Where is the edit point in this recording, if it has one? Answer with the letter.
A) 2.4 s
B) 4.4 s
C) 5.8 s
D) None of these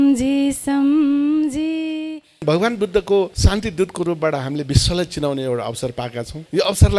A